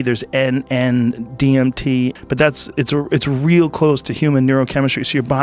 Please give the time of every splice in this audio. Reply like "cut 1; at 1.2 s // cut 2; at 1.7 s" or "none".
cut 1; at 2.2 s